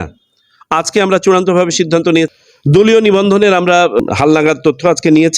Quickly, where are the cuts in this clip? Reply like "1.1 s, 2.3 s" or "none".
2.3 s, 4.0 s